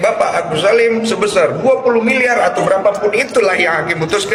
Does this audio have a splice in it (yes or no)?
no